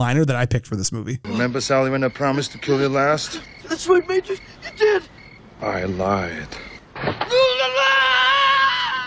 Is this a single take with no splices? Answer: yes; 0 cuts

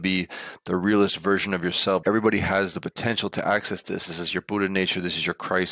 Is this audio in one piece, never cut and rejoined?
no; 1 cut; at 2.0 s

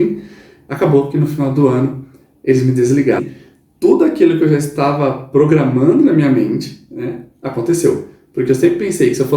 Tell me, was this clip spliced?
yes; 1 cut; at 3.2 s

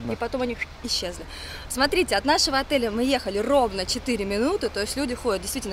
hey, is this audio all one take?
yes; 0 cuts

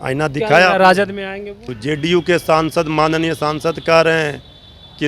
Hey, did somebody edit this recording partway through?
yes; 1 cut; at 1.7 s

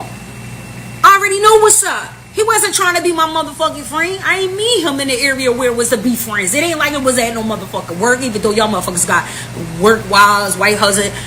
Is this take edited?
no; 0 cuts

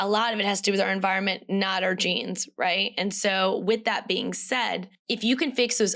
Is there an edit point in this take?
no; 0 cuts

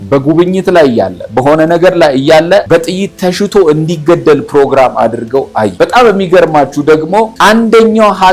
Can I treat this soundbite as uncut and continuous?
no; 3 cuts; at 2.6 s, 5.7 s, 7.3 s

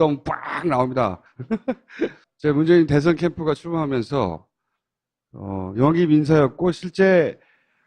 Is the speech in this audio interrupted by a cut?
yes; 1 cut; at 1.8 s

